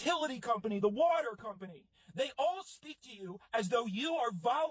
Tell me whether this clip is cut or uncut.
uncut